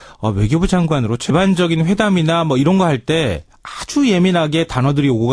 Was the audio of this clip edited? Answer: no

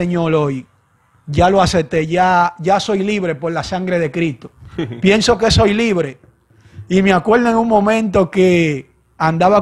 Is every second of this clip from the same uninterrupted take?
yes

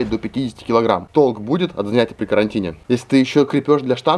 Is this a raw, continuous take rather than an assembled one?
no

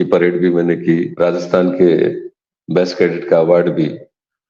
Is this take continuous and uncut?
no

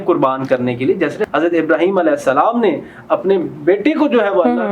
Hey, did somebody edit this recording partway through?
yes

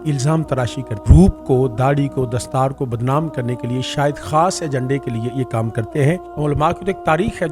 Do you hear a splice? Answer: yes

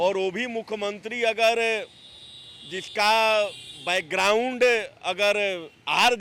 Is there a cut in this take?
no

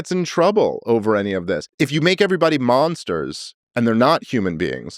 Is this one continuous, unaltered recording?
no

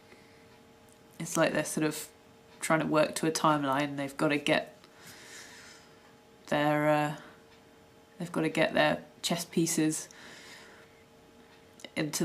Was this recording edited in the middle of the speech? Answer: yes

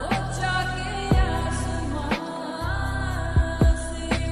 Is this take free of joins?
yes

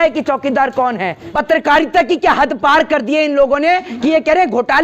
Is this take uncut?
no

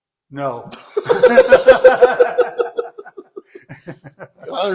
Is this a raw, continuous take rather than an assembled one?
yes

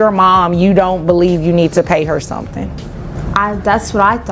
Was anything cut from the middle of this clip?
yes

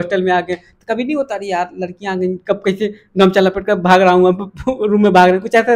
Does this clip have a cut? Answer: no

